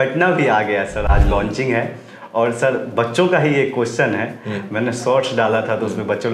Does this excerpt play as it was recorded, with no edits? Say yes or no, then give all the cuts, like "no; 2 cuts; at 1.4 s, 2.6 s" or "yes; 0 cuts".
yes; 0 cuts